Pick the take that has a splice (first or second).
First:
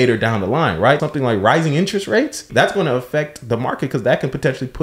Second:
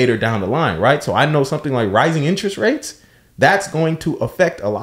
first